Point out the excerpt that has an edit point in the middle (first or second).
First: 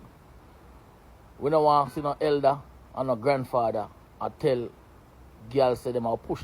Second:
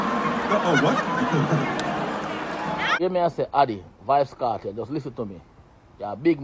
second